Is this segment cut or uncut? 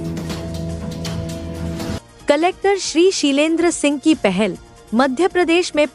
cut